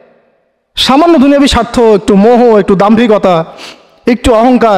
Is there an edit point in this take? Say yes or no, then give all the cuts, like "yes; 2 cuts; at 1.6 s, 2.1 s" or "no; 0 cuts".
no; 0 cuts